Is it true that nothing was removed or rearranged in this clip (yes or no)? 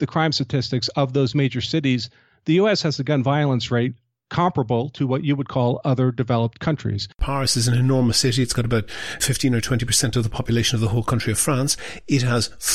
no